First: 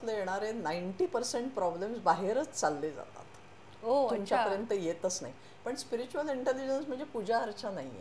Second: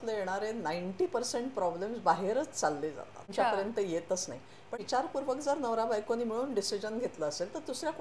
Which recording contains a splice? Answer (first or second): second